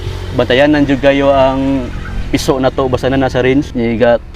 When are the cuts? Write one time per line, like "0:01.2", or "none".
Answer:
none